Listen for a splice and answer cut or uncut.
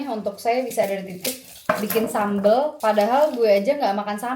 cut